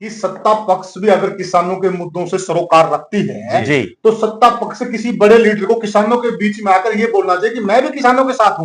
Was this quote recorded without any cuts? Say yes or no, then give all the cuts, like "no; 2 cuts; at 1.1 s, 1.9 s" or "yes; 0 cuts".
yes; 0 cuts